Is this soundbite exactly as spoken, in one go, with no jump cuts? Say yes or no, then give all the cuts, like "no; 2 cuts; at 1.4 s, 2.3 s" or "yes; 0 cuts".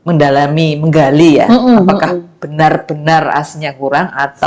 yes; 0 cuts